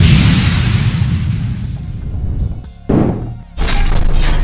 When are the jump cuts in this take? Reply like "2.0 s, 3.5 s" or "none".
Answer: 3.4 s